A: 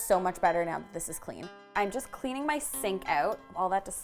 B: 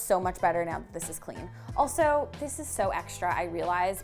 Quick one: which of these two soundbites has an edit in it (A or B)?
A